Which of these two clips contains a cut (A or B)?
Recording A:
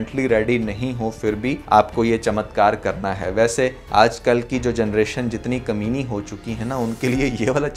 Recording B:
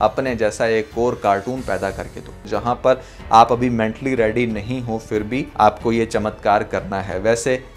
B